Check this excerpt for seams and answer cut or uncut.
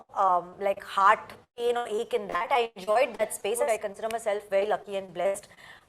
cut